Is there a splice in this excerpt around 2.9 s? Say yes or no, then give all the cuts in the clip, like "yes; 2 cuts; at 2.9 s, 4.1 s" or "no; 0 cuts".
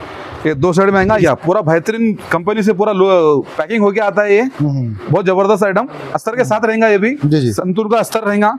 no; 1 cut; at 1.2 s